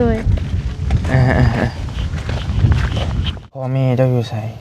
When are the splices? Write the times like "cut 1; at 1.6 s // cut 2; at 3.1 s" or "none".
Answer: cut 1; at 3.6 s